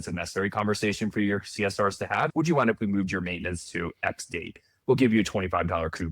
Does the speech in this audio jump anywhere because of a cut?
yes; 1 cut; at 2.3 s

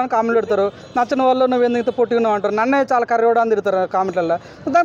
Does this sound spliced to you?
no; 0 cuts

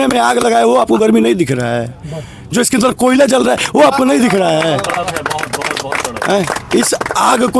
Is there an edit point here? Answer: no; 0 cuts

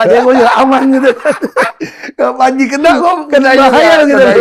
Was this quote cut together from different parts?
no; 0 cuts

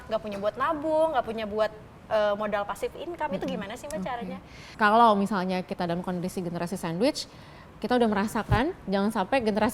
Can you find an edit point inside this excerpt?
yes; 1 cut; at 4.7 s

